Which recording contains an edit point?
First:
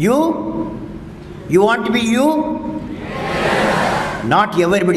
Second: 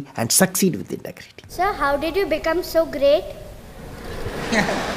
second; 1 cut; at 1.5 s

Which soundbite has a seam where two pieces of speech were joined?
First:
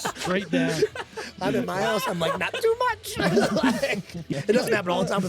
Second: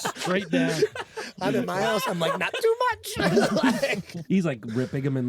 first; 1 cut; at 4.3 s

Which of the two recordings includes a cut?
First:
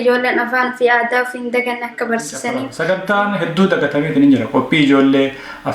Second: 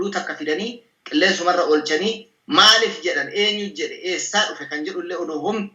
first; 1 cut; at 2.7 s

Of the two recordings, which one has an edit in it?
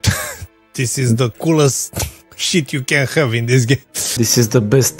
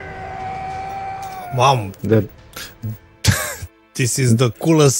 first; 1 cut; at 4.1 s

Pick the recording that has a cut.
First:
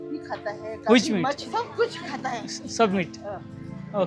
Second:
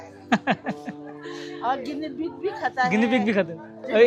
first; 1 cut; at 1.4 s

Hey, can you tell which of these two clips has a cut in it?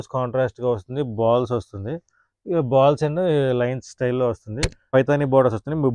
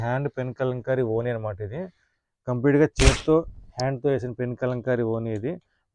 first; 1 cut; at 4.9 s

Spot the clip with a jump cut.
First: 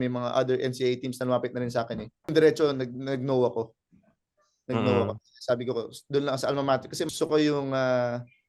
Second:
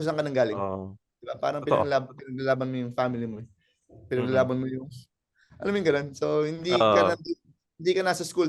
first; 2 cuts; at 2.3 s, 7.1 s

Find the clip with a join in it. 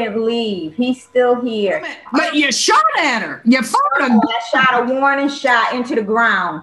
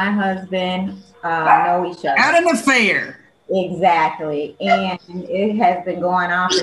first; 1 cut; at 2.0 s

